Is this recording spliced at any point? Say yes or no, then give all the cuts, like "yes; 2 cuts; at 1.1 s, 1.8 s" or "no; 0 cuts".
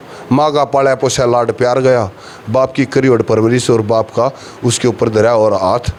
no; 0 cuts